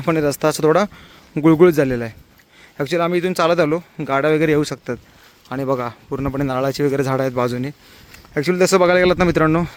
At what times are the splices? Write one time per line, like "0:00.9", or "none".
none